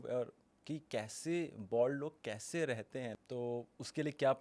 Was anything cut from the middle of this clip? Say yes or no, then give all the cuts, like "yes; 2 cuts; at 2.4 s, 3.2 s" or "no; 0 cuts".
yes; 1 cut; at 3.1 s